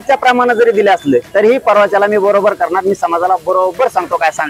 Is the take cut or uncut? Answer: cut